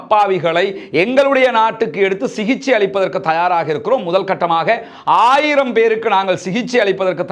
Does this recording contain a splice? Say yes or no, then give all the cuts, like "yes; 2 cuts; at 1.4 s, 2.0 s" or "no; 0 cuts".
no; 0 cuts